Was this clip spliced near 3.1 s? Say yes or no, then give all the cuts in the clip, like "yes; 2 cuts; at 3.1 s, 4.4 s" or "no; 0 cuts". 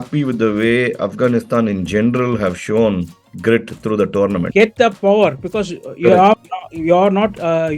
no; 1 cut; at 4.5 s